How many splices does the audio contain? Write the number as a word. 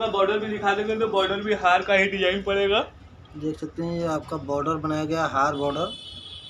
zero